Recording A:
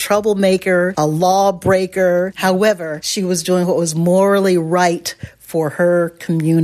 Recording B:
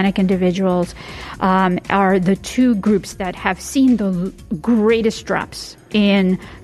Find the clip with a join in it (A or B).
A